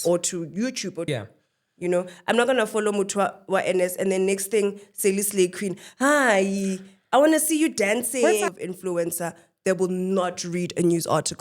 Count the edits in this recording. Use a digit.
2